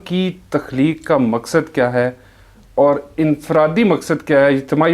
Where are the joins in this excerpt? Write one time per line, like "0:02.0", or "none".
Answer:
none